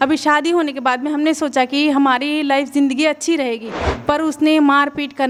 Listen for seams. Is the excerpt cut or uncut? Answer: uncut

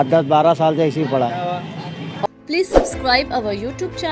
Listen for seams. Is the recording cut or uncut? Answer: cut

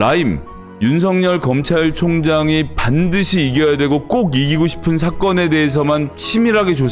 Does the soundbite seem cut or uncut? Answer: uncut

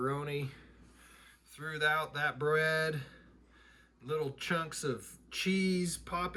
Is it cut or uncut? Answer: uncut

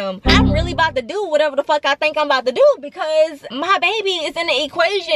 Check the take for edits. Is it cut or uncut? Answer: uncut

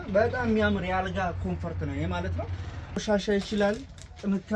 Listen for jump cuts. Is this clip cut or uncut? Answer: cut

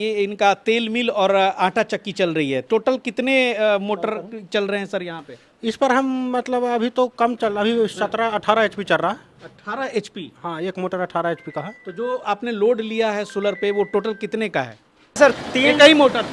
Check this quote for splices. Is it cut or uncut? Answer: cut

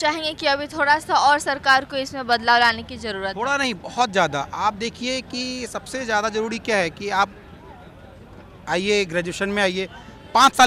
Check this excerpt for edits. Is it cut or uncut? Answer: uncut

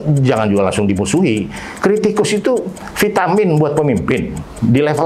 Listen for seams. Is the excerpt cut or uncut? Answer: uncut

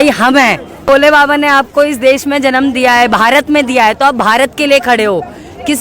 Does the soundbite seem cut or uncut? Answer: cut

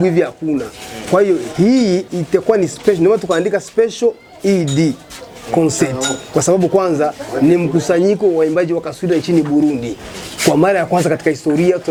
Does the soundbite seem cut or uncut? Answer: uncut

